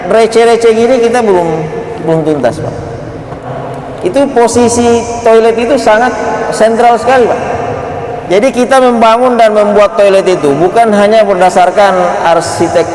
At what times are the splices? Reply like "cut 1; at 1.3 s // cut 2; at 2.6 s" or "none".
cut 1; at 3.5 s